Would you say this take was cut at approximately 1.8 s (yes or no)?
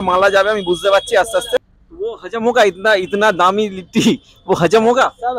yes